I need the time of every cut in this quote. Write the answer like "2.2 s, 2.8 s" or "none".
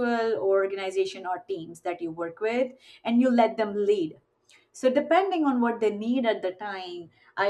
none